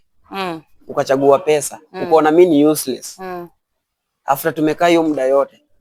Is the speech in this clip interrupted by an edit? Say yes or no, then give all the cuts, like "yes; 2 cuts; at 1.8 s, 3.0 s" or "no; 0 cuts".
no; 0 cuts